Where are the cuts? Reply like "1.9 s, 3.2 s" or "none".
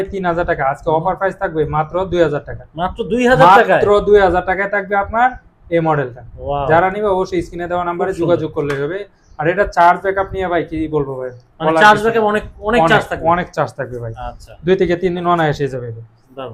none

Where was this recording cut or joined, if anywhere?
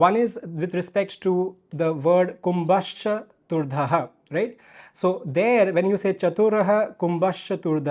none

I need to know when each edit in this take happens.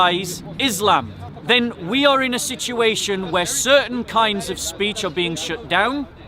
1.2 s

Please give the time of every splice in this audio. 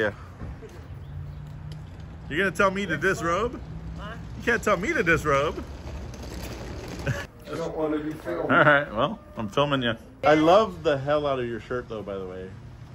7.2 s, 10.1 s

